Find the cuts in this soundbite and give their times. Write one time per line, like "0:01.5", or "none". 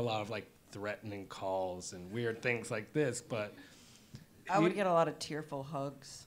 0:01.9